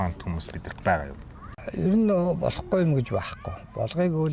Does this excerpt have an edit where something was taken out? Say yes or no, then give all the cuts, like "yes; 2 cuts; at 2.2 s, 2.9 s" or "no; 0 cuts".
yes; 1 cut; at 1.5 s